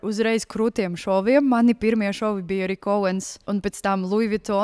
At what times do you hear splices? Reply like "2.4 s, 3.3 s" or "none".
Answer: 3.3 s